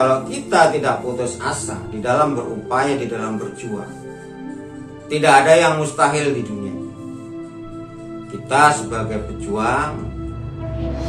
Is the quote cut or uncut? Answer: cut